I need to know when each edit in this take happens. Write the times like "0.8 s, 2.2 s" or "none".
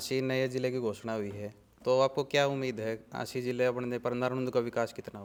none